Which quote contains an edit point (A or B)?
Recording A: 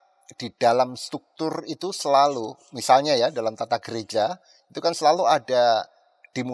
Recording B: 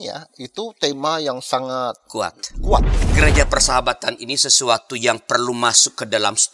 B